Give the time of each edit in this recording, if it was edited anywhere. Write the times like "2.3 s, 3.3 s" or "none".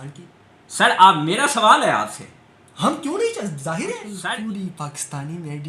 4.1 s